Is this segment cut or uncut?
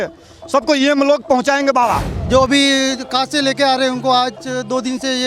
cut